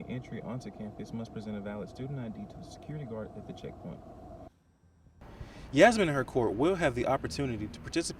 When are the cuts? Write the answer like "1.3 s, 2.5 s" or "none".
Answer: 4.7 s